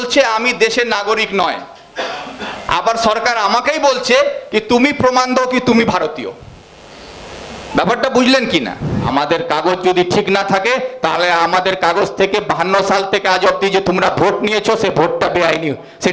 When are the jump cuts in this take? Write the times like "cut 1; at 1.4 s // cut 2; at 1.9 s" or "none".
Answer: cut 1; at 9.1 s